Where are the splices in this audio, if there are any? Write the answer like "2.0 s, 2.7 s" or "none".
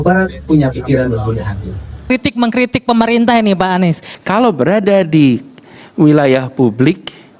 2.1 s, 4.1 s